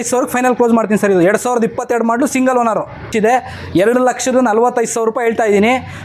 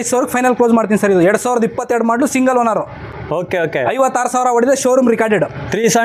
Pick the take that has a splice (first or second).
first